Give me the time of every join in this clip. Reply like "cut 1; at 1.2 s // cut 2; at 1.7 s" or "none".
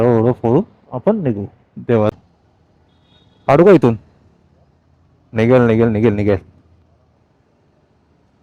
cut 1; at 2.1 s